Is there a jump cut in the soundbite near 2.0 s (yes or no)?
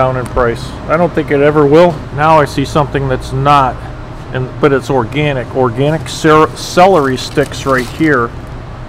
yes